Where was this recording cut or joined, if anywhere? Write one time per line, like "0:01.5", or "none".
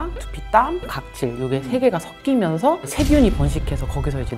0:00.9